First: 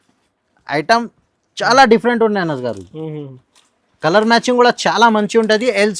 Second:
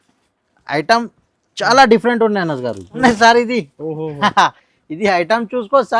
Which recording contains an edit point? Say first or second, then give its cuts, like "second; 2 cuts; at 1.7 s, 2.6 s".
second; 1 cut; at 3.0 s